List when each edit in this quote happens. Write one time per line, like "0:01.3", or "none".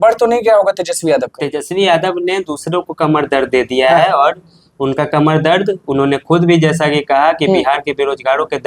none